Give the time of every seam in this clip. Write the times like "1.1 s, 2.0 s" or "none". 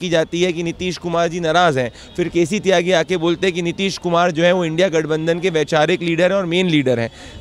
none